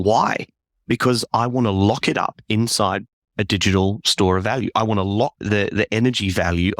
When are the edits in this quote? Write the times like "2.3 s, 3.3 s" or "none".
5.4 s